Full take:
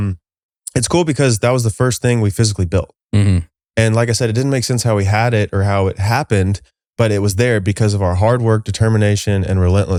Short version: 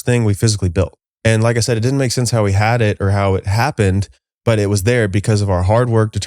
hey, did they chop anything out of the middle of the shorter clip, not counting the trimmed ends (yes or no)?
yes